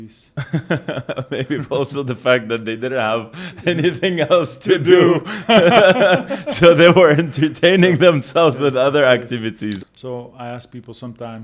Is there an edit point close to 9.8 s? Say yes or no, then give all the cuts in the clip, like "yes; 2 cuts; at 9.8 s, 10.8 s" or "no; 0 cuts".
yes; 1 cut; at 9.8 s